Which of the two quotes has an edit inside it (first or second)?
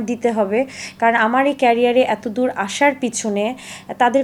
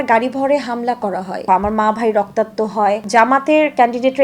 second